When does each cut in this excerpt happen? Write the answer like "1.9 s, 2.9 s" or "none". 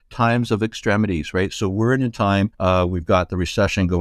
2.5 s

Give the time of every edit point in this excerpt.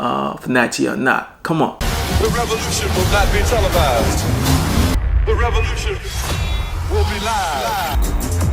1.8 s

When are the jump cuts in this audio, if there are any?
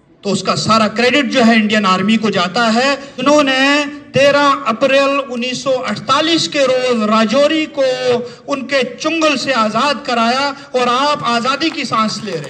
3.2 s

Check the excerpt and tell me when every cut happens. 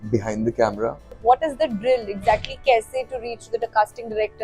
1.1 s

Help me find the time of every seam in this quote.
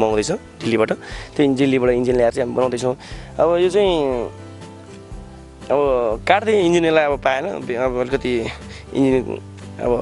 none

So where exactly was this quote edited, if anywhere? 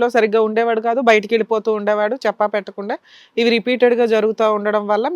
none

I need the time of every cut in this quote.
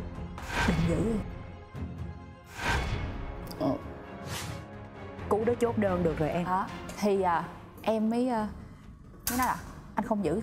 none

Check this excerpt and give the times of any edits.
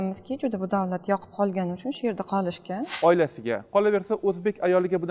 2.9 s

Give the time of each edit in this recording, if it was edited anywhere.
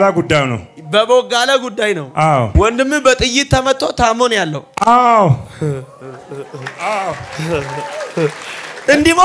2.5 s

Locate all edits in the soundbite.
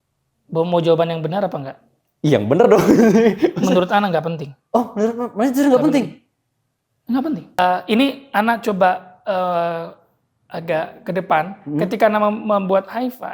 7.6 s

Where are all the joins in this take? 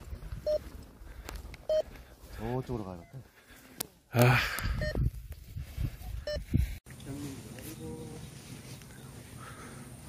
6.8 s

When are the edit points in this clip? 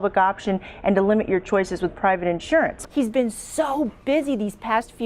2.8 s

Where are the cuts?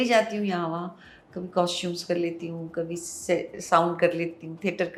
none

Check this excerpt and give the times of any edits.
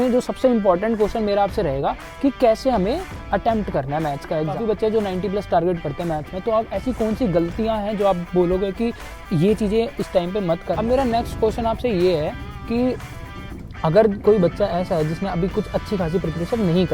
4.5 s, 10.7 s

